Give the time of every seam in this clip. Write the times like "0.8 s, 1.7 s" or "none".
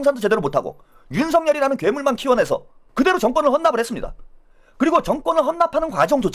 none

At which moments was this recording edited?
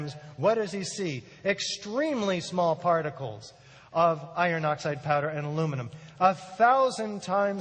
none

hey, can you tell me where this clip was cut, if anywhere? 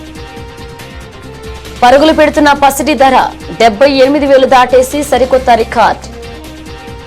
none

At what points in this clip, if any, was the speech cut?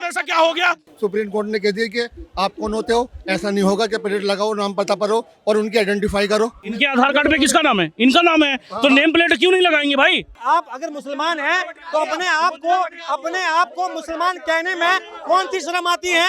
0.9 s, 6.6 s, 10.3 s

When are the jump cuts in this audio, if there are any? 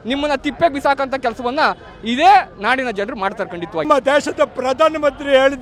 3.9 s

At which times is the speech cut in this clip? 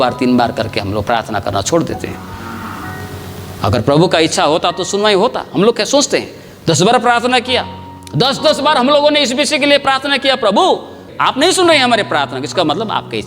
11.1 s

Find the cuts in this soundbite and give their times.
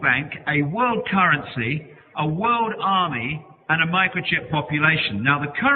1.8 s

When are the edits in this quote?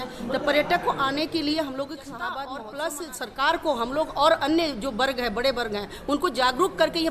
2.6 s

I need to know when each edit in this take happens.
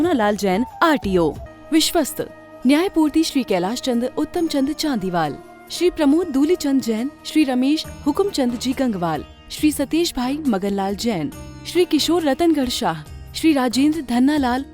1.5 s

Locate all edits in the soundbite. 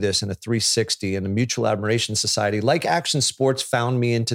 none

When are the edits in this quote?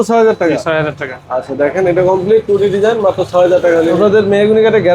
4.0 s

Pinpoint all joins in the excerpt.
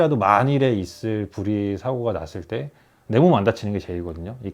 none

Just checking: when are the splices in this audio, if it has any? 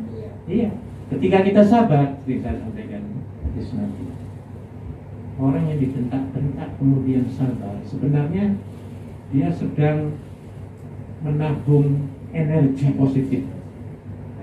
none

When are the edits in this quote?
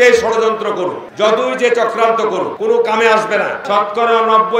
1.0 s, 2.5 s, 3.6 s

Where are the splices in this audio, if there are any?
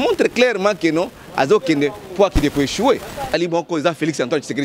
3.3 s

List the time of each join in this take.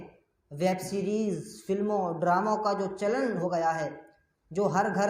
3.4 s

